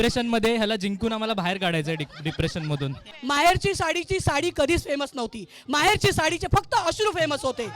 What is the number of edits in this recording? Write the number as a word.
one